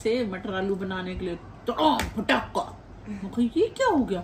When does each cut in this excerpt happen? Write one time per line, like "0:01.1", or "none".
none